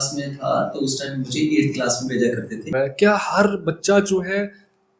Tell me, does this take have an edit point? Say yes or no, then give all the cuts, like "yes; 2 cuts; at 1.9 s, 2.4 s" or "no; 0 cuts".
yes; 1 cut; at 2.7 s